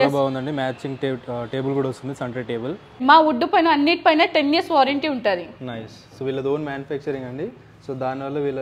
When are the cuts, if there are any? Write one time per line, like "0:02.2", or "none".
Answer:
0:03.0